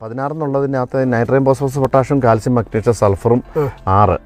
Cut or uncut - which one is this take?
uncut